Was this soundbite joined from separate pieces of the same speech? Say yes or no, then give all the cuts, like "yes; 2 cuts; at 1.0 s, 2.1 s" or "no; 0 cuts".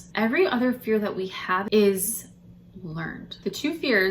yes; 2 cuts; at 1.6 s, 3.3 s